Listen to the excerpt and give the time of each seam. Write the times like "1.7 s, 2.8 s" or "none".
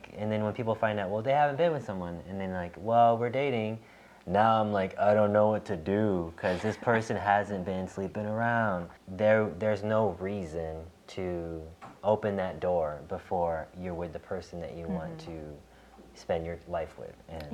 9.0 s, 11.0 s, 11.8 s